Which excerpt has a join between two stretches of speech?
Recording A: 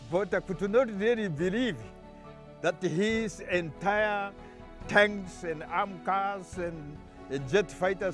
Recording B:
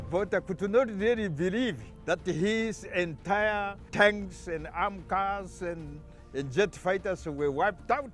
B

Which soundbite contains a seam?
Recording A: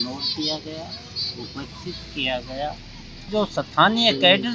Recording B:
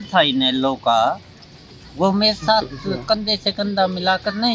A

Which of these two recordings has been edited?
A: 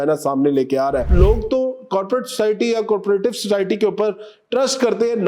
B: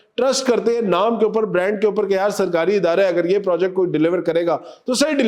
A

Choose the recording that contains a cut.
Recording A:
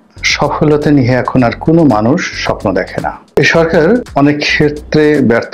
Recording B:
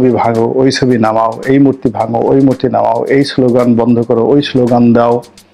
A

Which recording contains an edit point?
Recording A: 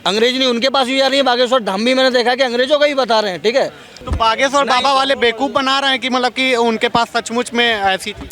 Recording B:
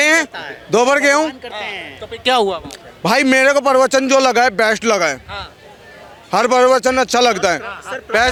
A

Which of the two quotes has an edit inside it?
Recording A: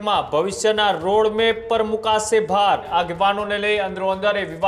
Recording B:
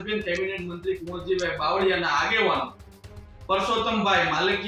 A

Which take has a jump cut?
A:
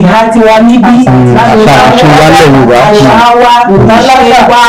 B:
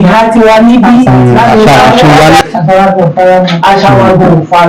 B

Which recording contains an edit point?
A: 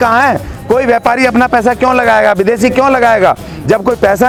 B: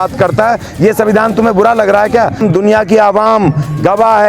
B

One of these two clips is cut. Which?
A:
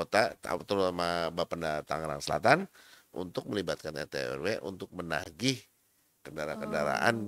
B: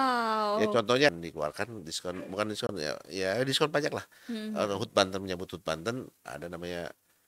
B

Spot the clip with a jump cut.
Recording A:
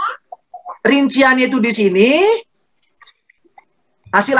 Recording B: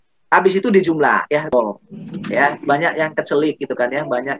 B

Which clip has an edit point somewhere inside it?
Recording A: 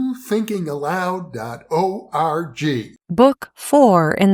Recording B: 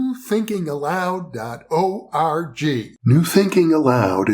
B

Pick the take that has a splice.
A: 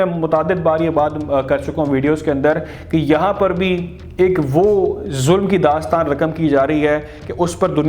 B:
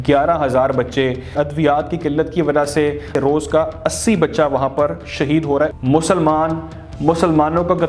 B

